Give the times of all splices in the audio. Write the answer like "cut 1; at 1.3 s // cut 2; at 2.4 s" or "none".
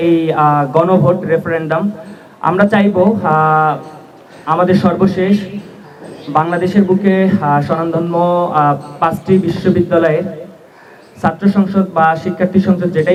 none